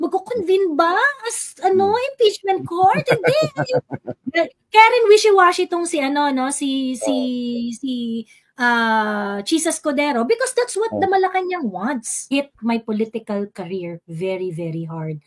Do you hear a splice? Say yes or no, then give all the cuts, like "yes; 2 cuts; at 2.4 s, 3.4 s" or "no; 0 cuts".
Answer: yes; 1 cut; at 12.1 s